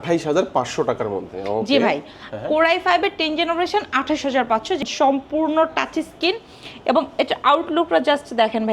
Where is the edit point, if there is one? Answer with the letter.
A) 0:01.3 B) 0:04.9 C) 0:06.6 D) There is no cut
B